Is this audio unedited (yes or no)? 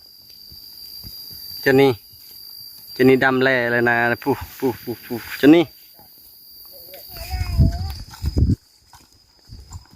no